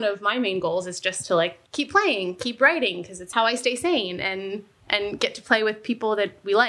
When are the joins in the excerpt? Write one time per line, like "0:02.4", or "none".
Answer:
0:01.6
0:03.2